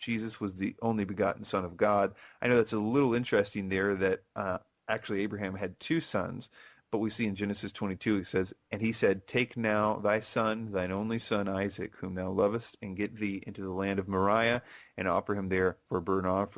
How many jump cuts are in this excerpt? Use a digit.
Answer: 0